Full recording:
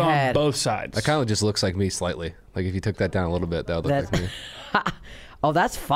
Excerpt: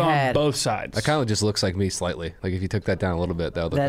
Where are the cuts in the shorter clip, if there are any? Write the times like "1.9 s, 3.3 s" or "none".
2.3 s